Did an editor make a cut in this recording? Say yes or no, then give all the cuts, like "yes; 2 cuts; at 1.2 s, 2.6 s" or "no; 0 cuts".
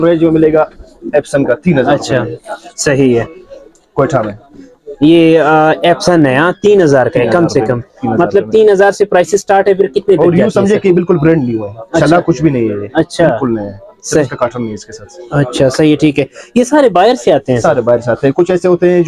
no; 0 cuts